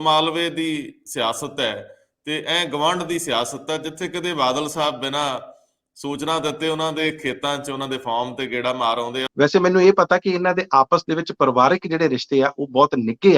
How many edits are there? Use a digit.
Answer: 1